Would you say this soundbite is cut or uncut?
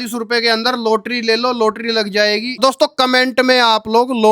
cut